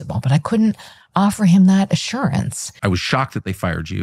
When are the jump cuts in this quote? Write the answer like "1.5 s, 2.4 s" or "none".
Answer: 2.8 s